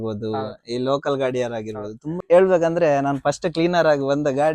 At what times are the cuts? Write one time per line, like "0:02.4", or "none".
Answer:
0:02.2